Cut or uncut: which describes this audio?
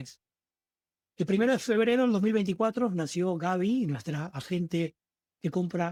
uncut